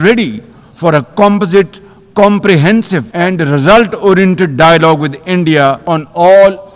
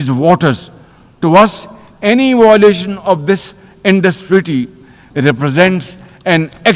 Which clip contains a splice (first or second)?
first